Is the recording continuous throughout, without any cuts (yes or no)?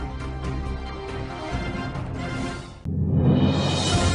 no